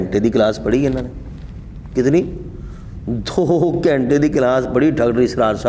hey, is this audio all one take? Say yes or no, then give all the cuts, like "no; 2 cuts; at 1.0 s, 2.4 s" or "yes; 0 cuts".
yes; 0 cuts